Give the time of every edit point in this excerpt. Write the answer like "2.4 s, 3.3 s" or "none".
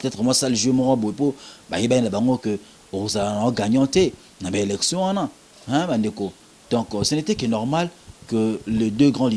none